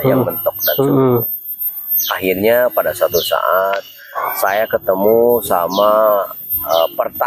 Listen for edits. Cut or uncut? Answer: uncut